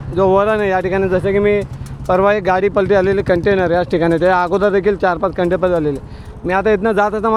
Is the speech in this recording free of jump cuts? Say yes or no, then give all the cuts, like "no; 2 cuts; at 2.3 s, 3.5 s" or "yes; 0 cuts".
yes; 0 cuts